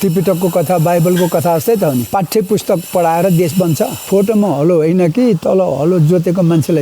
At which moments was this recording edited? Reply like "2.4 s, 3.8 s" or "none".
2.1 s, 4.0 s